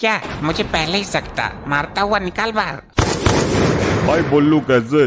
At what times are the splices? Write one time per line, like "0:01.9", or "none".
0:02.8